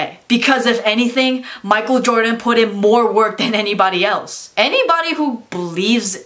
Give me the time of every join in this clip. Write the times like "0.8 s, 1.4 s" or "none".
4.4 s